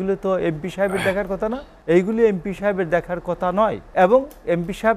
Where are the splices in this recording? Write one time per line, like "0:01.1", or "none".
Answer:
0:01.7
0:03.8